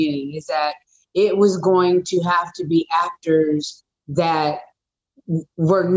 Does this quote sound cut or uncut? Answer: uncut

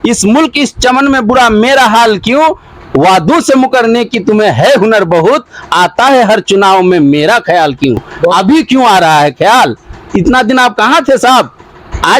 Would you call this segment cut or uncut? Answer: uncut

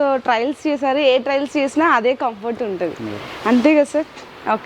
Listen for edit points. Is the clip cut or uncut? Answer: uncut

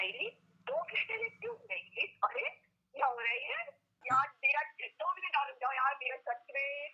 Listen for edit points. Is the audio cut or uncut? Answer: cut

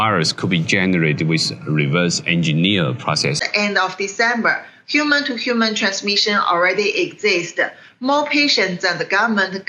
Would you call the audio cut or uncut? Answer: cut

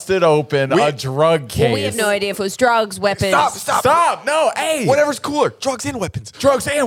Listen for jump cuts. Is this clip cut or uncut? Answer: uncut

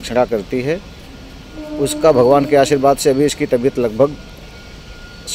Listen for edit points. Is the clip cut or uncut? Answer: uncut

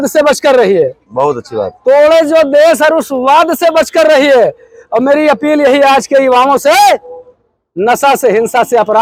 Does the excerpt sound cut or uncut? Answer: uncut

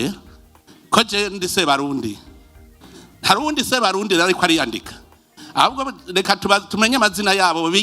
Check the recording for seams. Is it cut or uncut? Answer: uncut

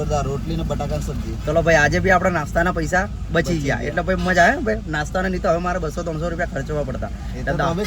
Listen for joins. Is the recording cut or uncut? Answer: uncut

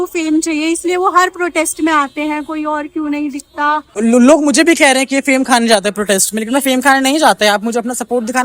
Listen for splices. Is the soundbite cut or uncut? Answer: cut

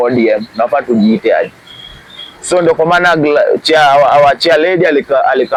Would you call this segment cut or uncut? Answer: uncut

